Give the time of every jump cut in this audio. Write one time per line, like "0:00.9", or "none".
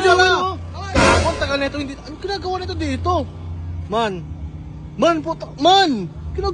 none